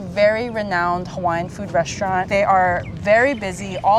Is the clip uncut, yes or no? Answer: yes